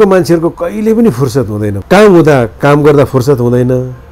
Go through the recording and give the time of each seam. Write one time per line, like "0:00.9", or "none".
0:01.7